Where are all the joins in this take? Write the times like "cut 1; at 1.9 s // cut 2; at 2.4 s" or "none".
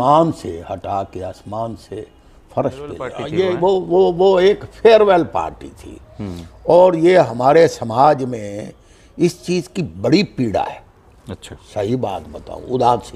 cut 1; at 3.2 s